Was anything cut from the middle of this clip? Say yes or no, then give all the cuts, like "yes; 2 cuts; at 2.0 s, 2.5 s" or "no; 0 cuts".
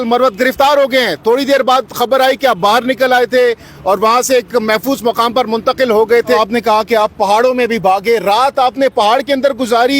yes; 1 cut; at 6.4 s